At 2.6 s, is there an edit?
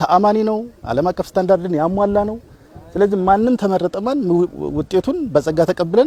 no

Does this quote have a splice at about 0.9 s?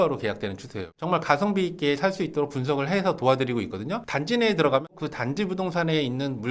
yes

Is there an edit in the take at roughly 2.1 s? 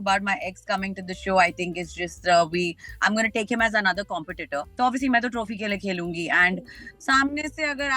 no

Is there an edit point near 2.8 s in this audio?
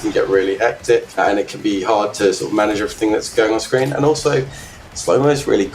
no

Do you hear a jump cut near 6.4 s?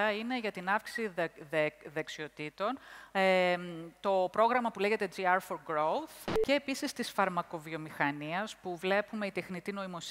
yes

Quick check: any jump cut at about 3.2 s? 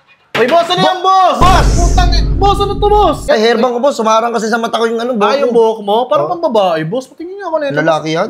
yes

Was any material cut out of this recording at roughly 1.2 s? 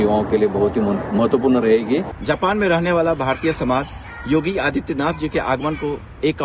yes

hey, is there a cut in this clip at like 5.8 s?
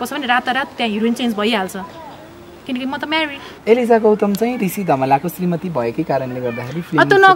no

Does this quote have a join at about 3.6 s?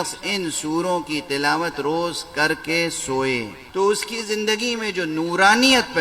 yes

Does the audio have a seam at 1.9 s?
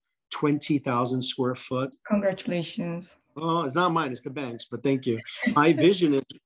yes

